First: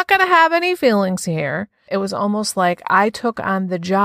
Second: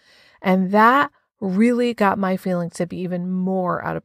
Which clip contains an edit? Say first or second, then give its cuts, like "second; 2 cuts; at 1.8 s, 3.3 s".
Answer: first; 1 cut; at 1.8 s